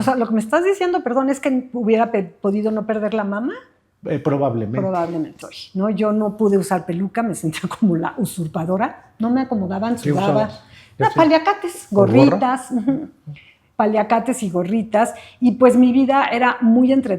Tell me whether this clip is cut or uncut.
cut